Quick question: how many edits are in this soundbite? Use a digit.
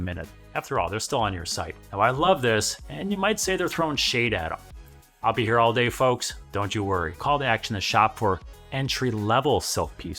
2